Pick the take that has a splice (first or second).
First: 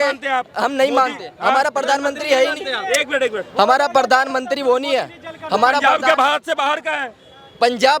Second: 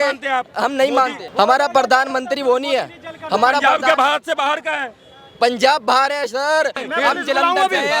second